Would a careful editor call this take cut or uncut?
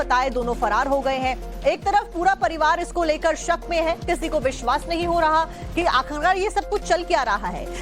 cut